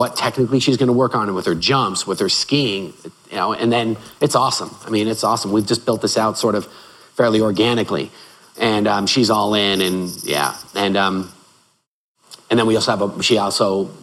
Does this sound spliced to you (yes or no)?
no